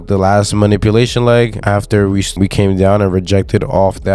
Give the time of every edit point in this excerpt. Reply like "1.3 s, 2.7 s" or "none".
none